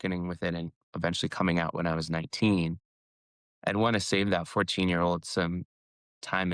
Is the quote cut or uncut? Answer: uncut